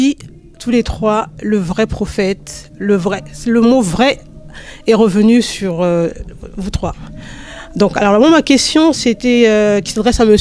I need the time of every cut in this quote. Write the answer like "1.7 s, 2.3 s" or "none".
none